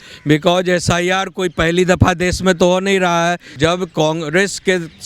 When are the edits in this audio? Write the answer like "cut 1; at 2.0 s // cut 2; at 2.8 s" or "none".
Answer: cut 1; at 3.5 s